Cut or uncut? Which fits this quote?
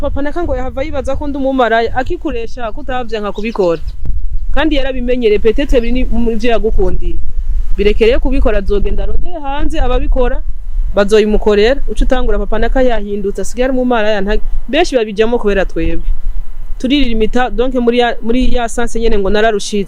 uncut